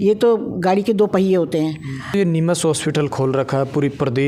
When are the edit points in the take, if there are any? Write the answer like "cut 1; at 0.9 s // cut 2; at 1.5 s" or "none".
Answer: cut 1; at 2.1 s